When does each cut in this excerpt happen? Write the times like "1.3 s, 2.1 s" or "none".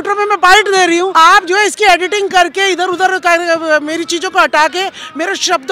1.1 s